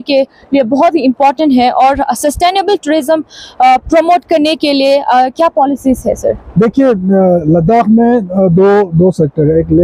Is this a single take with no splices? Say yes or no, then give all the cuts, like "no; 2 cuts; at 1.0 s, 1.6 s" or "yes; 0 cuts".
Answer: yes; 0 cuts